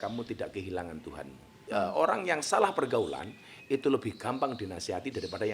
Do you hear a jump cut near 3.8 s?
no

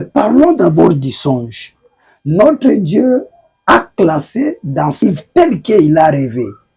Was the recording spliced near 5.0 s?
yes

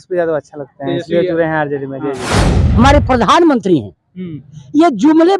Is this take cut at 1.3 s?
no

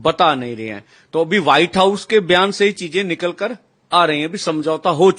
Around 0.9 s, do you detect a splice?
no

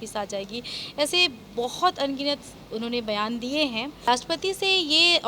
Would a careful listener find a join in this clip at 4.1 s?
yes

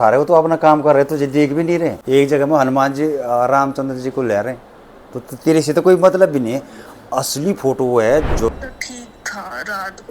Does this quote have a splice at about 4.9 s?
no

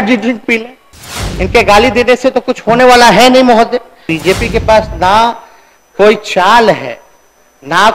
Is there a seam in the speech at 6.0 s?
no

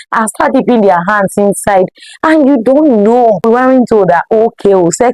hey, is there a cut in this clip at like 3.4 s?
yes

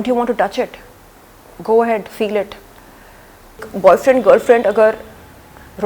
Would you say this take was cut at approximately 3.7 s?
yes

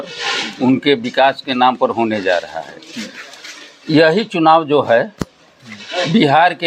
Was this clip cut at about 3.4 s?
no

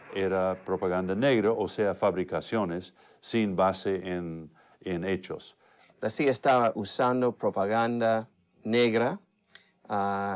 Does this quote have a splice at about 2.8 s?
yes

